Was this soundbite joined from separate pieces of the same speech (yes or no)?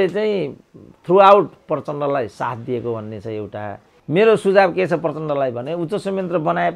yes